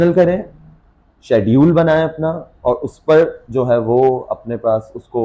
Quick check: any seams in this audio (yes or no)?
no